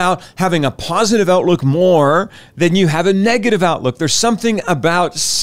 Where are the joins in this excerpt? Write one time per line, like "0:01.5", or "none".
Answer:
none